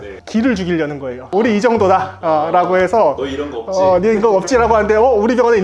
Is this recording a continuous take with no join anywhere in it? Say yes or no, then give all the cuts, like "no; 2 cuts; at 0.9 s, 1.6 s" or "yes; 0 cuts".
yes; 0 cuts